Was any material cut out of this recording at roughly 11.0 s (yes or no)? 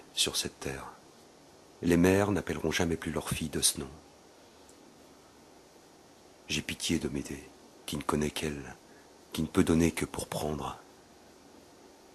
no